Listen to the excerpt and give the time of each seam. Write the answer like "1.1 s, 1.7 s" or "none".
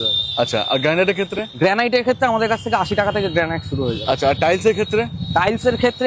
none